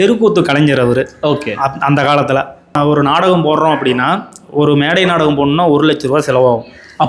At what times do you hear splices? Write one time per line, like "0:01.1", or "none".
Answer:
0:02.7